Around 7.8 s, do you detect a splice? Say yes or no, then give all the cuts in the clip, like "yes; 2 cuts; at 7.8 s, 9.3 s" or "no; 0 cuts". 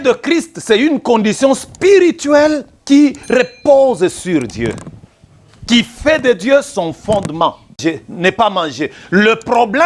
yes; 1 cut; at 7.8 s